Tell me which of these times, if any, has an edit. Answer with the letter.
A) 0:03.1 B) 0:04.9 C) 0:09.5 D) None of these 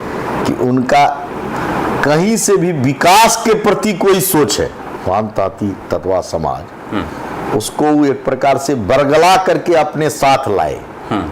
B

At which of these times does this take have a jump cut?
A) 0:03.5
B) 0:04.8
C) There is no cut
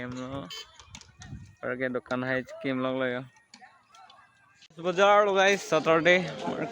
B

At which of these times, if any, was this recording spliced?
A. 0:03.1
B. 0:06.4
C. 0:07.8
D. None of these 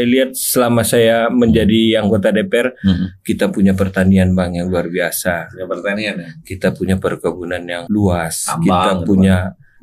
C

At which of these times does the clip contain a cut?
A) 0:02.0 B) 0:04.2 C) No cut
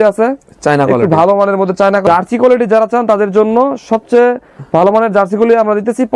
A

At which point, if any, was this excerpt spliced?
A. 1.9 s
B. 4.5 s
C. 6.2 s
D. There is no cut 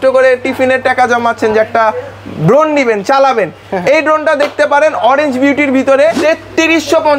C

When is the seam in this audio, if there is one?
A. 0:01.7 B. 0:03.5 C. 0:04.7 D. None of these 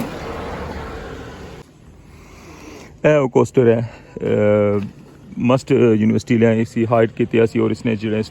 A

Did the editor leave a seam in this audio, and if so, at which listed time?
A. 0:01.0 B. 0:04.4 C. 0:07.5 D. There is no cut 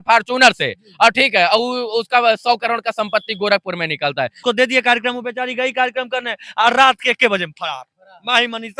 B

